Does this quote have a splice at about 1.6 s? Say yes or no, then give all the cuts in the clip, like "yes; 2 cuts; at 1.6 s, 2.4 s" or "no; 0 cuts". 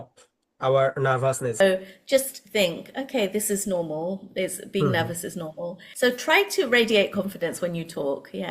yes; 2 cuts; at 1.6 s, 5.8 s